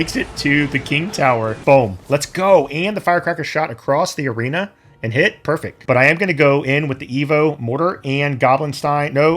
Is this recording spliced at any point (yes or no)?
yes